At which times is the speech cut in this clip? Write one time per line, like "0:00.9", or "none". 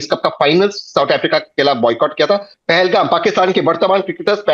0:02.5